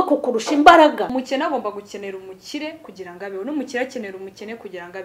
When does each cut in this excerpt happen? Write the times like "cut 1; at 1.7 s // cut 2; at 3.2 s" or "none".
cut 1; at 1.1 s